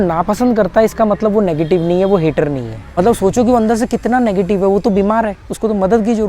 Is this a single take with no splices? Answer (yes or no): no